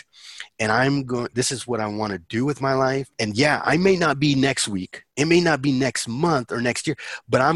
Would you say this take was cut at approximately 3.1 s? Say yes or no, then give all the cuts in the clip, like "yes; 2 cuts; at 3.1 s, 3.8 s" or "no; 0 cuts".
yes; 1 cut; at 3.1 s